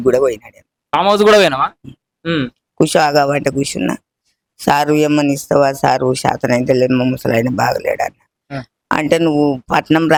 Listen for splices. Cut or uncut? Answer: uncut